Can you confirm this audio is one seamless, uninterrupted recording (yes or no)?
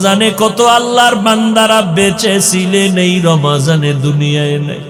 yes